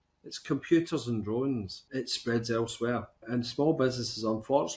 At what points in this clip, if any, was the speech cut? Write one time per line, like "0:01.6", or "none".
0:01.8
0:03.2